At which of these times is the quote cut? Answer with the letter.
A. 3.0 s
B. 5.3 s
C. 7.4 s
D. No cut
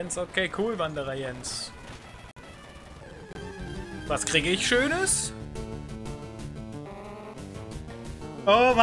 A